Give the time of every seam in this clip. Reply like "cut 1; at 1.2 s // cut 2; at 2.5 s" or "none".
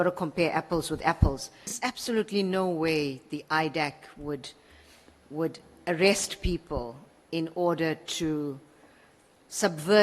cut 1; at 1.8 s